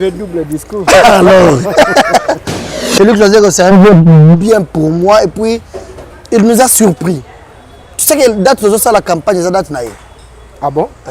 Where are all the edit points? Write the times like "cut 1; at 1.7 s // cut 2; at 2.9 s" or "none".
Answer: cut 1; at 2.5 s